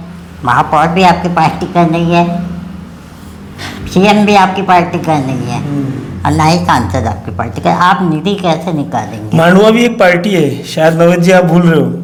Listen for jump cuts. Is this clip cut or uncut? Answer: uncut